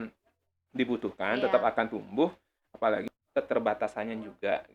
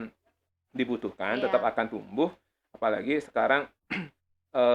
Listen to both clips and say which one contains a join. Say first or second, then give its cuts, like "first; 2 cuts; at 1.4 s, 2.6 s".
first; 1 cut; at 3.0 s